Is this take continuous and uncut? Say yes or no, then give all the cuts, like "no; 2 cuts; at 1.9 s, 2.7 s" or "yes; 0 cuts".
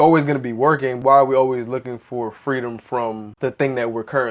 no; 2 cuts; at 0.9 s, 3.3 s